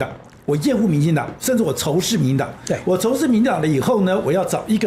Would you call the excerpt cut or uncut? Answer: uncut